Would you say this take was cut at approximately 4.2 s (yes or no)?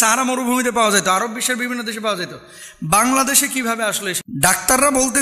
yes